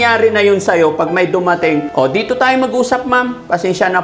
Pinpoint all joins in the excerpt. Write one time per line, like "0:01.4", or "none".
0:01.9